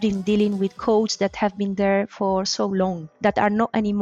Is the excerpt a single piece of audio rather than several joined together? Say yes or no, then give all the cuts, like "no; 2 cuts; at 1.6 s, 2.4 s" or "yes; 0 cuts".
no; 1 cut; at 3.1 s